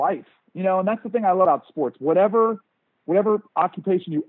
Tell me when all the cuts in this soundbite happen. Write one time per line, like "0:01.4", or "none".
0:01.5